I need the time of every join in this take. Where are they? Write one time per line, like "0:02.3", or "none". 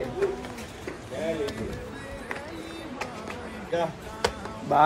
0:03.7